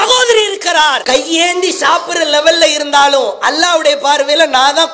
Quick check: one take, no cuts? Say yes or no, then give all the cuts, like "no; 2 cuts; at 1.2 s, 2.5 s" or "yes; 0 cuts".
yes; 0 cuts